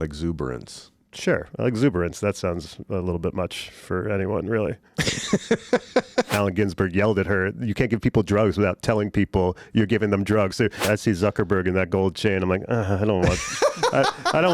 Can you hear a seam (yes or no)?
yes